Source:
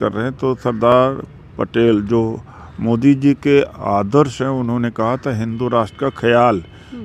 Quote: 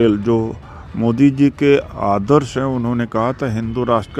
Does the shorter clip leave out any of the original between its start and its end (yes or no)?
no